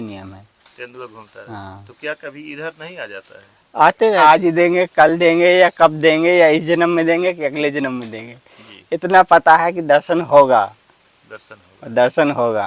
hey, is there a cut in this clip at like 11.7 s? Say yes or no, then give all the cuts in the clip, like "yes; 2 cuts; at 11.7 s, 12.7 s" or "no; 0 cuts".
no; 1 cut; at 4.2 s